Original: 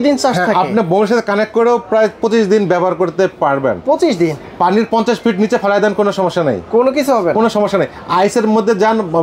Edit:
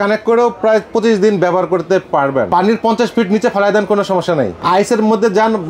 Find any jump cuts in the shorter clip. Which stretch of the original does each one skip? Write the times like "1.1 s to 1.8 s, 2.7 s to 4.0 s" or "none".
3.8 s to 4.6 s, 6.6 s to 8.0 s

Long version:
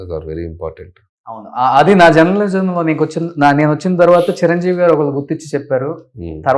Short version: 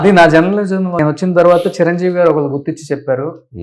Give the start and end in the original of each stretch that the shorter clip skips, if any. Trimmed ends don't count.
2.8 s to 3.6 s

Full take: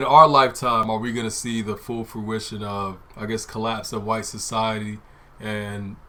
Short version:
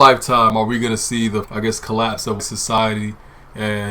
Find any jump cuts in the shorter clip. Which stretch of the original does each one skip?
1.8 s to 3.1 s, 4.4 s to 4.6 s

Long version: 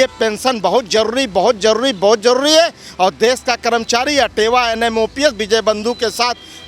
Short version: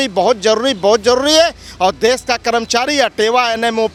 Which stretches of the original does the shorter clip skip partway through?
none

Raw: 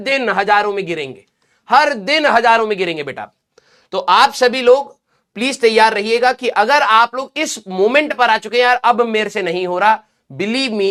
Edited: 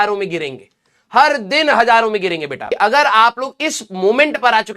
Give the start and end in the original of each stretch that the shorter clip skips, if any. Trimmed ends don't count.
3.2 s to 6.4 s

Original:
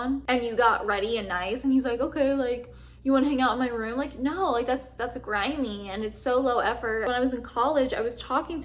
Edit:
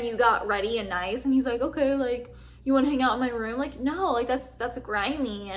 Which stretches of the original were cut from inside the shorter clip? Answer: none

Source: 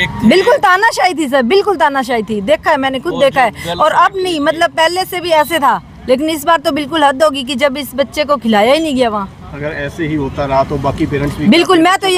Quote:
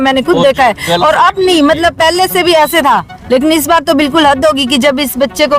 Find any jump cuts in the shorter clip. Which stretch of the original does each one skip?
none

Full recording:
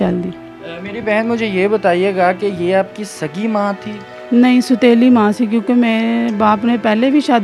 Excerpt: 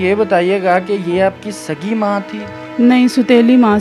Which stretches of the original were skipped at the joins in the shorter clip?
none

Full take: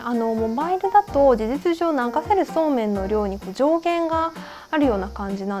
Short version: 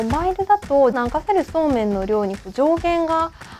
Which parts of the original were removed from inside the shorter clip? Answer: 1.4 s to 2.0 s

